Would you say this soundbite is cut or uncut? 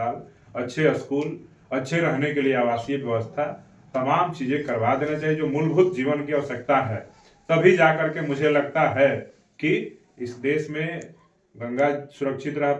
uncut